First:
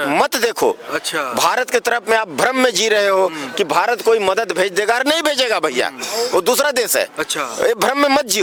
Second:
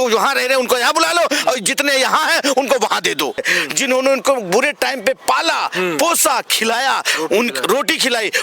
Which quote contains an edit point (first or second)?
second